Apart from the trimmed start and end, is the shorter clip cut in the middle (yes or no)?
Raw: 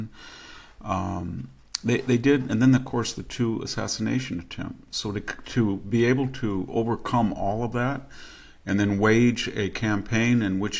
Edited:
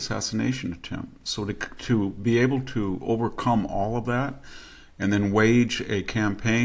no